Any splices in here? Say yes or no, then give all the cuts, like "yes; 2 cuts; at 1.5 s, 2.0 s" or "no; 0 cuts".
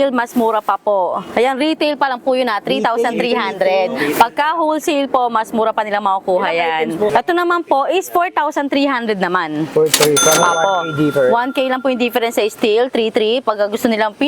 yes; 1 cut; at 7.1 s